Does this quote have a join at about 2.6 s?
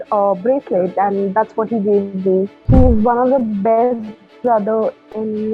yes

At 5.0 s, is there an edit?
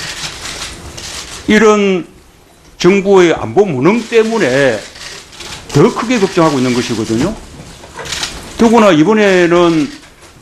no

